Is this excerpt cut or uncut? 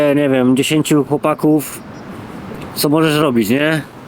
cut